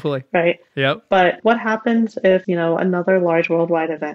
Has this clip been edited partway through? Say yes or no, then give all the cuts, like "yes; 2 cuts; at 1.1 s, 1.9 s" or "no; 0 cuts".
yes; 2 cuts; at 1.4 s, 2.5 s